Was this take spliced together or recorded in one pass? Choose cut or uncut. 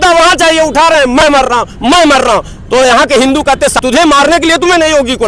cut